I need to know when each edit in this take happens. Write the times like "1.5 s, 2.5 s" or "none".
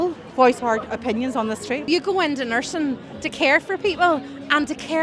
1.8 s